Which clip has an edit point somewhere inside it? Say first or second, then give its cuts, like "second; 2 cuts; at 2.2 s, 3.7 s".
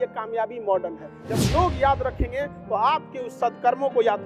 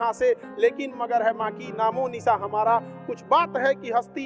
first; 1 cut; at 1.2 s